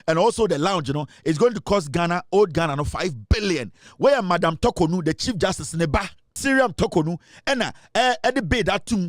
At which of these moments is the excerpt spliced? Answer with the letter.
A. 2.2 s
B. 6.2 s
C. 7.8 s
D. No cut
B